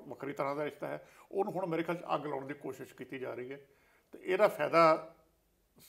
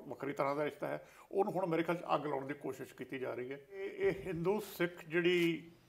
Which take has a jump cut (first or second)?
second